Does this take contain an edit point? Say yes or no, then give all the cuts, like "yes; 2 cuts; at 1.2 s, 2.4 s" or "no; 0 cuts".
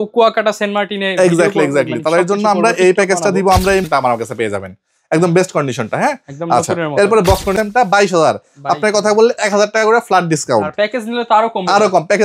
yes; 2 cuts; at 3.8 s, 7.5 s